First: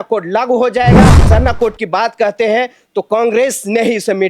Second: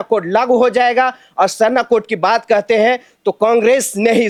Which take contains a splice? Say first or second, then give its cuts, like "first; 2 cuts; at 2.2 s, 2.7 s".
first; 1 cut; at 1.2 s